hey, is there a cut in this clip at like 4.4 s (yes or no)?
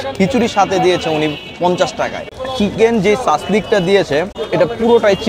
yes